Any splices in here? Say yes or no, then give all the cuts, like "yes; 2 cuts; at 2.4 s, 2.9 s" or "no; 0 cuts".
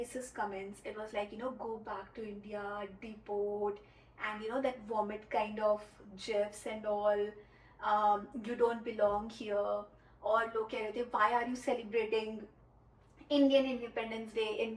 no; 0 cuts